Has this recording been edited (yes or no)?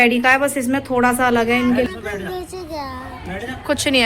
yes